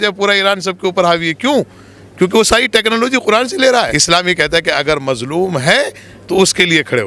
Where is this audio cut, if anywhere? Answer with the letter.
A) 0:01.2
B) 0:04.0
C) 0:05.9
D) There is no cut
B